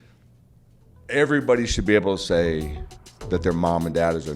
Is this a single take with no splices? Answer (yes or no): no